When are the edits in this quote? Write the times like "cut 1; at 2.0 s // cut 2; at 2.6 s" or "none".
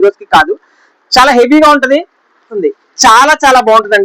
cut 1; at 2.5 s